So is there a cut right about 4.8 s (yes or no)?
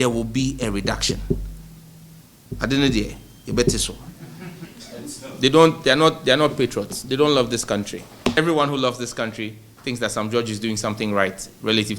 yes